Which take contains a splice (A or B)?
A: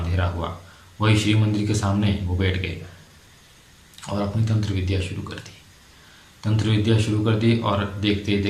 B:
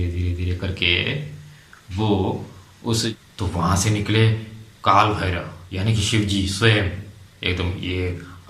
B